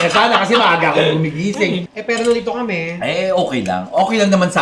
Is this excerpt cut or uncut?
cut